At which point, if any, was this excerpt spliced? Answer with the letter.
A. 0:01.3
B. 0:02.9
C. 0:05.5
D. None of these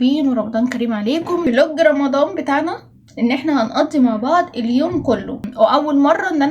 C